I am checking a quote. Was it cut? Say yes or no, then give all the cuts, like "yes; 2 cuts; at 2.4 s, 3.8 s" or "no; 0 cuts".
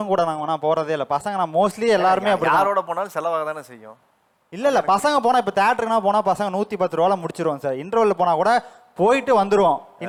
no; 0 cuts